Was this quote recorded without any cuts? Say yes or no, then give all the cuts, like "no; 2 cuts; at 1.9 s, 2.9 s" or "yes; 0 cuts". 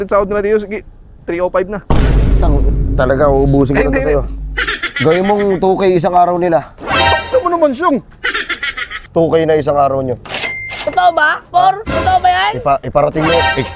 no; 1 cut; at 9.1 s